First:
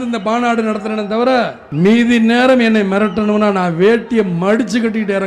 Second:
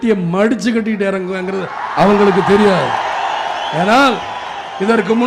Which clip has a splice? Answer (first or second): first